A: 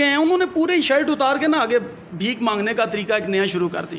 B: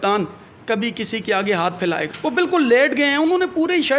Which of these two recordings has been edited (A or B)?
B